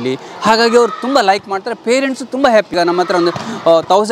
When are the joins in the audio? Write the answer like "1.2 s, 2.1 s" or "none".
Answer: 2.7 s